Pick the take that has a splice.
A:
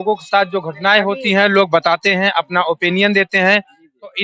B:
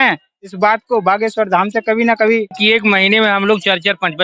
B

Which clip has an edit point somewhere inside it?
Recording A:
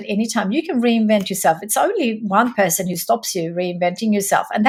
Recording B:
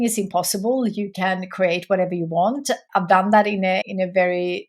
B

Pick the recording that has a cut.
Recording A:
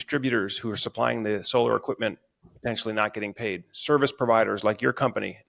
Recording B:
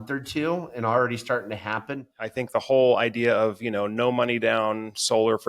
B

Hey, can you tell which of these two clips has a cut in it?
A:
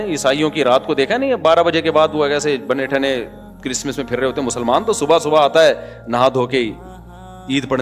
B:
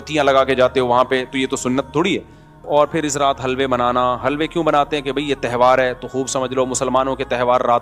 B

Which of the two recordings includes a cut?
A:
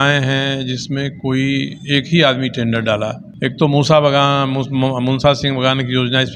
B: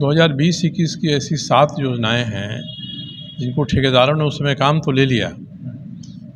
A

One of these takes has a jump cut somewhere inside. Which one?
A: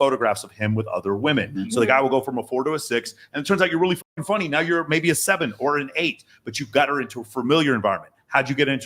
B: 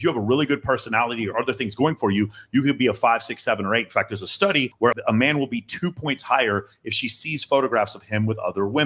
B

